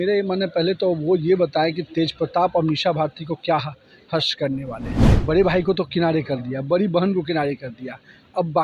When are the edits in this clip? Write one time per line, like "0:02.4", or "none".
0:05.1